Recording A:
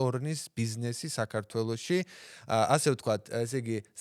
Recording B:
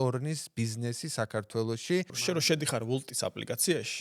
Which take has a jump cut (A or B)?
B